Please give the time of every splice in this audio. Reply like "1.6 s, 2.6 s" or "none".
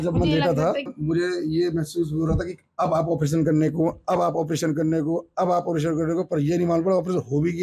0.9 s